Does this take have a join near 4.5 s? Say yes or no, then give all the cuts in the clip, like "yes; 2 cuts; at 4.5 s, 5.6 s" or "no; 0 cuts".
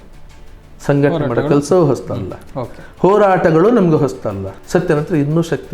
yes; 1 cut; at 4.5 s